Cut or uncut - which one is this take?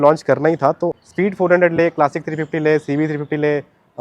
cut